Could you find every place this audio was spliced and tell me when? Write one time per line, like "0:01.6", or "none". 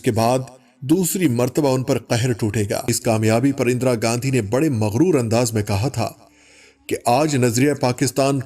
0:02.9